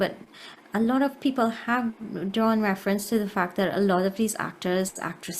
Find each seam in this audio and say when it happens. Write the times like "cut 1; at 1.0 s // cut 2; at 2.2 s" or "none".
none

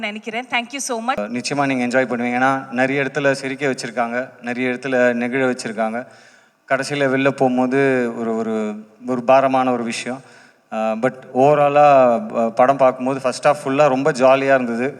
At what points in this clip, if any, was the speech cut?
cut 1; at 1.2 s

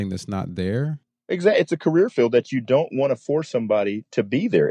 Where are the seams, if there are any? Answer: cut 1; at 1.1 s

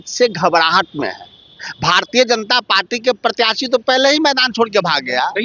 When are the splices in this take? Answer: none

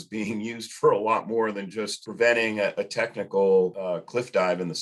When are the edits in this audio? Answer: none

